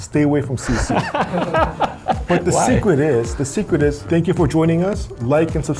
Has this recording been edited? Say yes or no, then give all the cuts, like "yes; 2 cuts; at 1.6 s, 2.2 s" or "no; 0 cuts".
yes; 1 cut; at 4.0 s